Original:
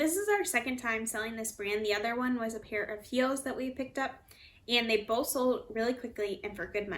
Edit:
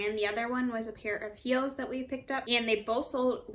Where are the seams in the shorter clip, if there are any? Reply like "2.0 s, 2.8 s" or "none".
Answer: 2.4 s